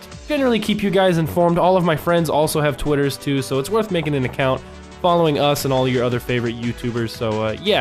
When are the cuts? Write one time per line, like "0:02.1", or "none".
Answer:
0:04.3